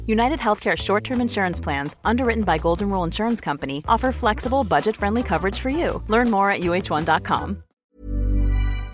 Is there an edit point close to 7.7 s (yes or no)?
yes